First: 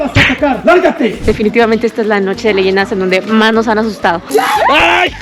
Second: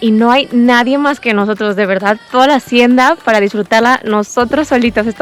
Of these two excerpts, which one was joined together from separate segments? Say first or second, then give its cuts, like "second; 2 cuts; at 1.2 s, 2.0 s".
first; 2 cuts; at 1.2 s, 4.2 s